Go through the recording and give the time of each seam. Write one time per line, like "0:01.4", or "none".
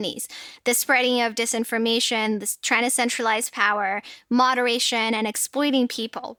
none